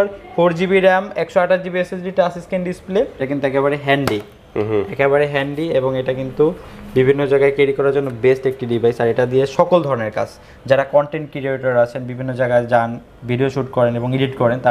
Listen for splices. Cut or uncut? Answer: cut